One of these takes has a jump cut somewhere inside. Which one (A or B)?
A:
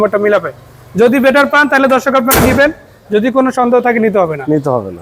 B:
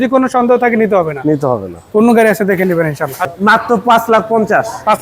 B